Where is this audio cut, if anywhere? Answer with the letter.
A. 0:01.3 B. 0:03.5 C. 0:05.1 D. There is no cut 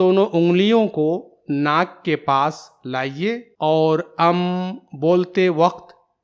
B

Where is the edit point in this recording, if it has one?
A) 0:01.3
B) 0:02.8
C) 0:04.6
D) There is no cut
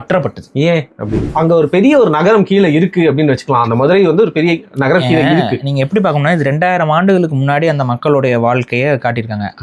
A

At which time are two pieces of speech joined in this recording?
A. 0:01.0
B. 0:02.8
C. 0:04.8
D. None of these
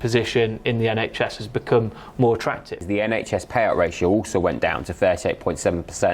B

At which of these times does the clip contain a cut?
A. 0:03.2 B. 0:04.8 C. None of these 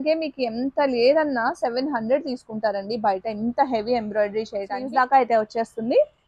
B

